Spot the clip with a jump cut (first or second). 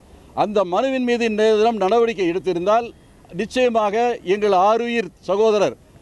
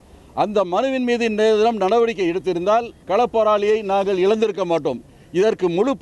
second